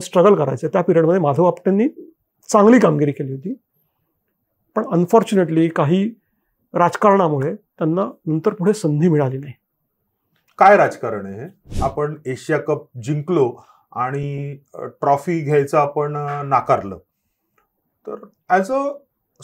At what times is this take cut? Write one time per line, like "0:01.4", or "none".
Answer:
0:11.7